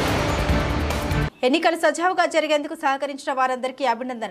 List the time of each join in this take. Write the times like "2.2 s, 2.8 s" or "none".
1.3 s